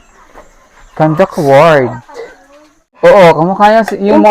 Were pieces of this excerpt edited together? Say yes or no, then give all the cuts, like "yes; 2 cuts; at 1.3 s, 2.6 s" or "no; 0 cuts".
yes; 1 cut; at 2.9 s